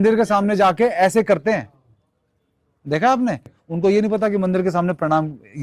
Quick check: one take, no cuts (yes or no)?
no